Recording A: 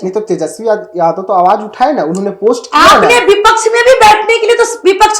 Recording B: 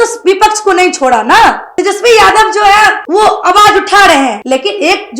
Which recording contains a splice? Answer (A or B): B